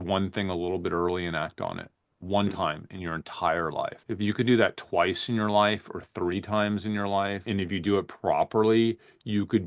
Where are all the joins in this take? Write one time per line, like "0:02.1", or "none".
0:04.0
0:07.5